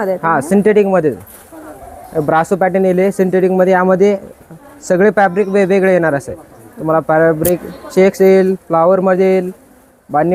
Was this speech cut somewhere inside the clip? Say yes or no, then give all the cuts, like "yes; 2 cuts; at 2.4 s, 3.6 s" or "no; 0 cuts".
no; 0 cuts